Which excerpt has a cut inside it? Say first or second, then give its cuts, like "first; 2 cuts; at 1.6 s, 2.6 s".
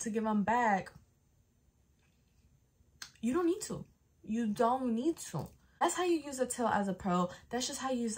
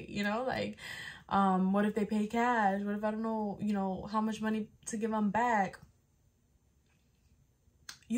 first; 1 cut; at 5.8 s